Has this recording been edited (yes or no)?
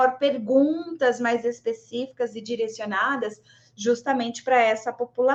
no